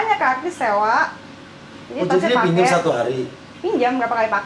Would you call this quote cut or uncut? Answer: uncut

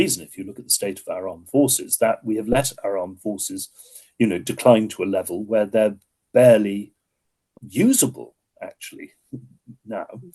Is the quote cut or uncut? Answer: uncut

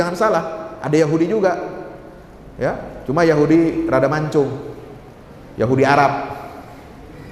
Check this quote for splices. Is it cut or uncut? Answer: uncut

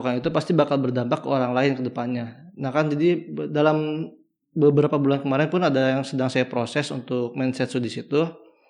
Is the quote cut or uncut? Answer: uncut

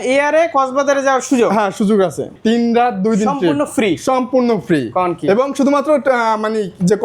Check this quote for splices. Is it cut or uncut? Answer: cut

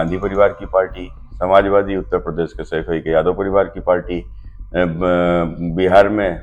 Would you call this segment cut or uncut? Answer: uncut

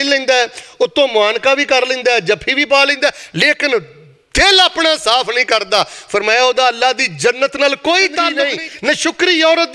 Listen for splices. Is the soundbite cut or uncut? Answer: cut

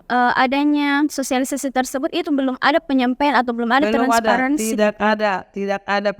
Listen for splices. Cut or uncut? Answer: uncut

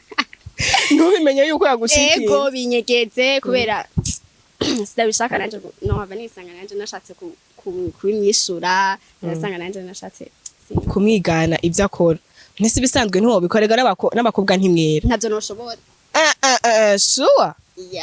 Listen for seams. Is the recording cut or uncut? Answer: uncut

